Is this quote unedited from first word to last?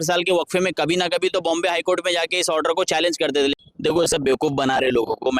no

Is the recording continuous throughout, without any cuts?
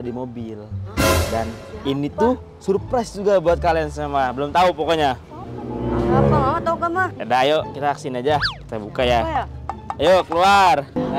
no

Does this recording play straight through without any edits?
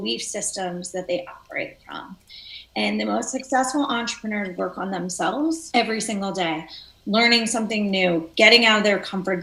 yes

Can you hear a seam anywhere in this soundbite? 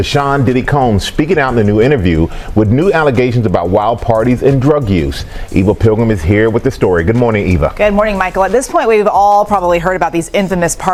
no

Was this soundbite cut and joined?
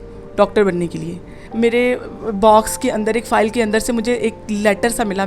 yes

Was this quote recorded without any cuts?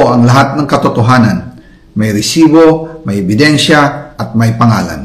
yes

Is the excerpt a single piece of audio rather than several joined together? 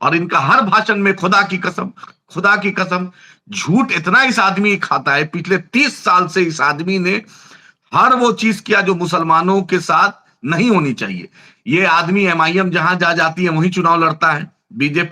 yes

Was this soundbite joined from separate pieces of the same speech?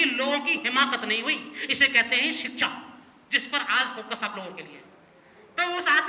no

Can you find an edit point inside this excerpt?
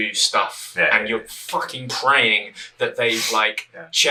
no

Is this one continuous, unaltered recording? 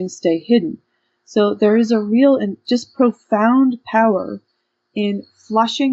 no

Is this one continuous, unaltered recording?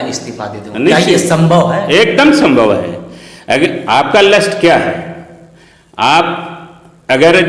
yes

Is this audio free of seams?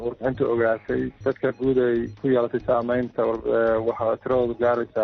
yes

